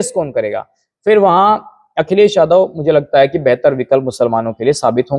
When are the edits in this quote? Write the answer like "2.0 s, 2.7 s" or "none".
none